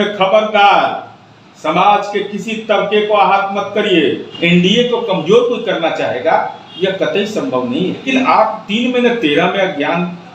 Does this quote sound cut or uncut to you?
cut